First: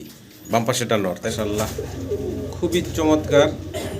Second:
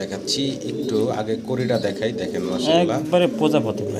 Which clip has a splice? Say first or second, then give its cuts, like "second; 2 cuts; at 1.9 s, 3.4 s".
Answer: first; 1 cut; at 1.2 s